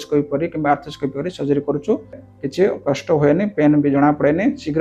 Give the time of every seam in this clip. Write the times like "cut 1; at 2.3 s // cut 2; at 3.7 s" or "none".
cut 1; at 2.3 s